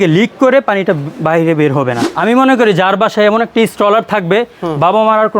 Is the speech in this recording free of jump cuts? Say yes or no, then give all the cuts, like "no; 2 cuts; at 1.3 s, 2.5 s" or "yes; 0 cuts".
no; 1 cut; at 2.1 s